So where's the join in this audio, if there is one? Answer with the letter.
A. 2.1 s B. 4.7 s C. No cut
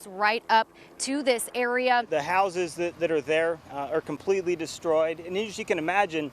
A